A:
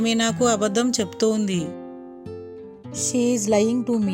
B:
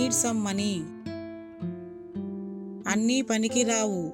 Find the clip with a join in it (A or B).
B